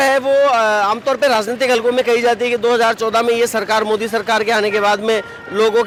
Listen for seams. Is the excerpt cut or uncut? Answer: uncut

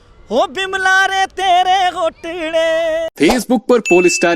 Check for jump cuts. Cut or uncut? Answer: cut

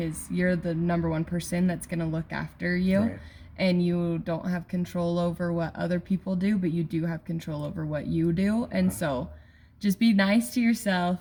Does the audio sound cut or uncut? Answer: uncut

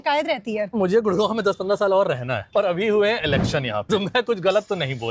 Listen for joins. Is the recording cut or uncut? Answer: cut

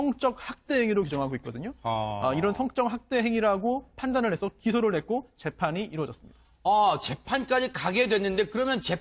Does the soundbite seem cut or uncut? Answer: cut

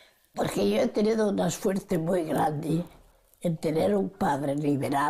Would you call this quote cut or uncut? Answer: cut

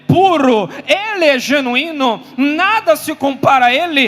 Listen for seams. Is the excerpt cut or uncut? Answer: uncut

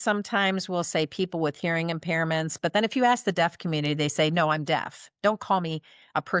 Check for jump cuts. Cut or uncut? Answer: uncut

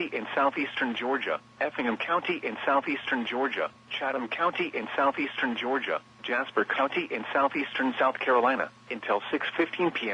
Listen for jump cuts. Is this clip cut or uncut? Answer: uncut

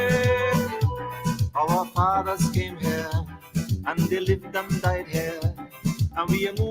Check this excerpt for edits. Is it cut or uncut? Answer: cut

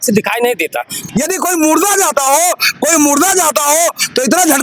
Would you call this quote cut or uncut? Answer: cut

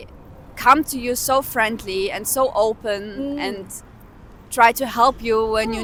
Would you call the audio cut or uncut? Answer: uncut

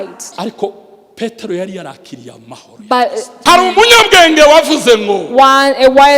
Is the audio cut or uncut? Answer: cut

